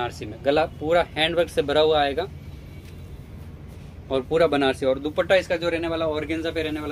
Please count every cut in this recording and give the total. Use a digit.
0